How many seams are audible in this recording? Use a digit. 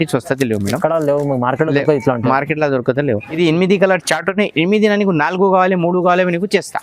1